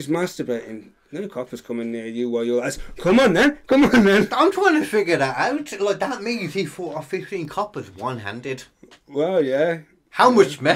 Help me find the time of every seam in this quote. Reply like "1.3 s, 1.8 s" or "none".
none